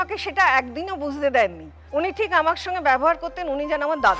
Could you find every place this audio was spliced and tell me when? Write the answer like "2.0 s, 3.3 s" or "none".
none